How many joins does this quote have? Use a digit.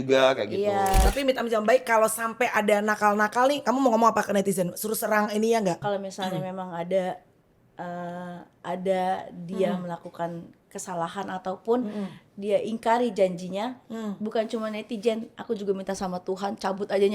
2